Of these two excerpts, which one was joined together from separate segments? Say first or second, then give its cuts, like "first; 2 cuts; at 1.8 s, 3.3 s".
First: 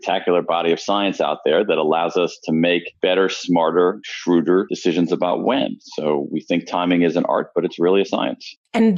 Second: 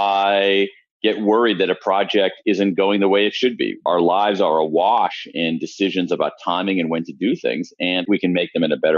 second; 2 cuts; at 3.8 s, 8.0 s